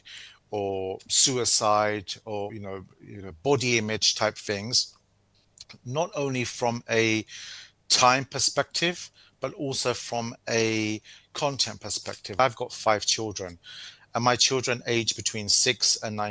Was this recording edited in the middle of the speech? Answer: yes; 2 cuts; at 2.6 s, 12.4 s

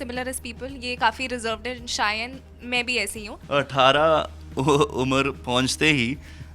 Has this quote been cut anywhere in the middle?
yes; 1 cut; at 3.3 s

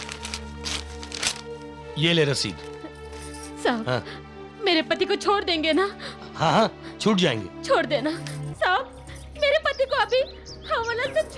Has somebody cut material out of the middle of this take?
yes; 1 cut; at 8.4 s

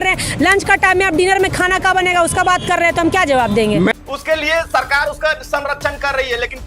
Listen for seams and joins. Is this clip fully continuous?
no; 1 cut; at 3.9 s

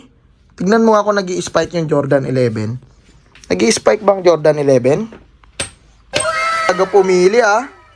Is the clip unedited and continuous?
no; 1 cut; at 6.7 s

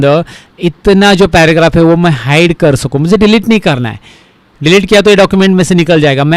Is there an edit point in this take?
no; 0 cuts

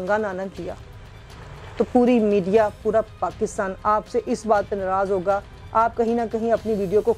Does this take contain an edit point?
no; 0 cuts

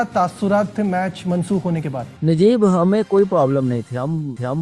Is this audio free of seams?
no; 1 cut; at 2.1 s

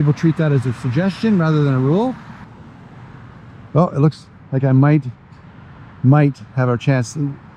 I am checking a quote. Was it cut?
no; 0 cuts

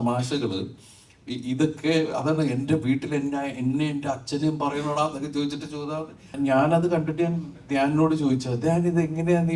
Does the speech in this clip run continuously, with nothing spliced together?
no; 1 cut; at 6.3 s

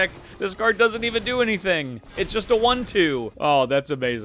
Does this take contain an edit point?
yes; 1 cut; at 3.3 s

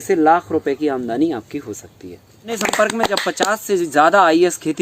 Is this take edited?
yes; 1 cut; at 2.5 s

